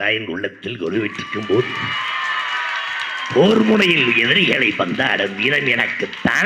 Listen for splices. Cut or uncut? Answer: uncut